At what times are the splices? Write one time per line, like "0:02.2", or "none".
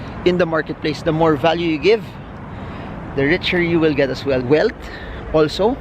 0:04.4